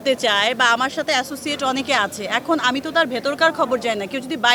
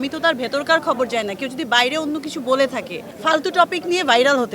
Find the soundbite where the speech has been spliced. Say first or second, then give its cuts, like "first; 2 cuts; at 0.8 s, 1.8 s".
second; 1 cut; at 3.1 s